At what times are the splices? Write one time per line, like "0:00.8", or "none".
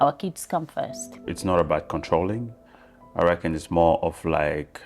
0:01.3